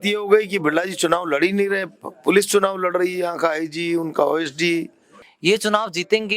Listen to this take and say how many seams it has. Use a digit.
1